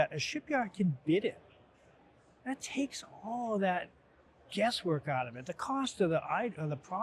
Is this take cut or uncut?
uncut